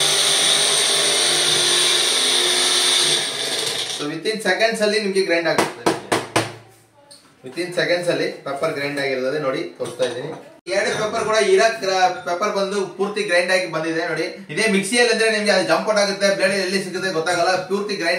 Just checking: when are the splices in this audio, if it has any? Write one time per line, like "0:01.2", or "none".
none